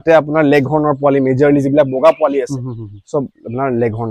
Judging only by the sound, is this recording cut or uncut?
uncut